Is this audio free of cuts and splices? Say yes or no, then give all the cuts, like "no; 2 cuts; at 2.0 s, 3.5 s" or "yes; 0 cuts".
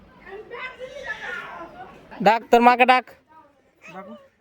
no; 1 cut; at 2.1 s